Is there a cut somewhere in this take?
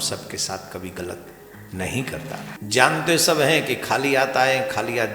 yes; 1 cut; at 2.5 s

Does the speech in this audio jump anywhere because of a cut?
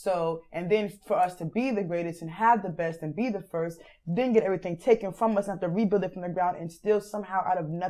no; 0 cuts

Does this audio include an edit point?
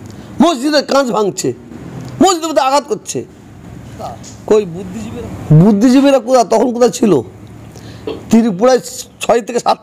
yes; 1 cut; at 4.8 s

